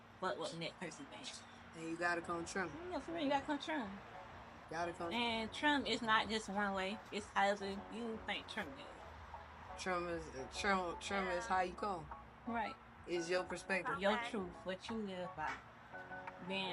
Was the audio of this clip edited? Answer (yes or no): yes